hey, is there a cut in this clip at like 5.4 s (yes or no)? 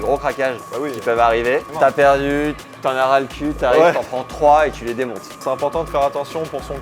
yes